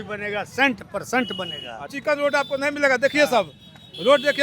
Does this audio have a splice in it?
yes; 1 cut; at 1.9 s

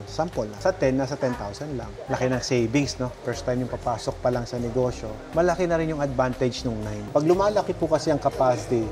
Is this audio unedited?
no; 2 cuts; at 3.1 s, 7.0 s

